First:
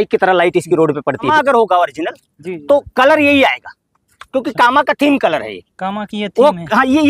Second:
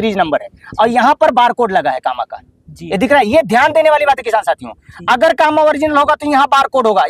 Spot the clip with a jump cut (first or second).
first